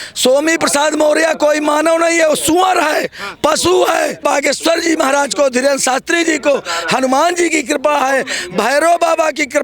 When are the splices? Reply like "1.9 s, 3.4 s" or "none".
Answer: 4.2 s